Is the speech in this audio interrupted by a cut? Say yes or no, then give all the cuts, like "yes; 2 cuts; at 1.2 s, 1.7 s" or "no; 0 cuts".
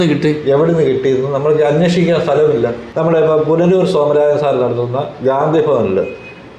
yes; 1 cut; at 2.8 s